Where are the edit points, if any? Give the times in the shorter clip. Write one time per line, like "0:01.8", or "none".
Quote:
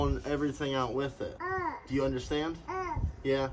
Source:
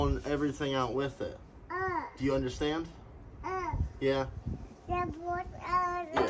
0:01.3
0:02.6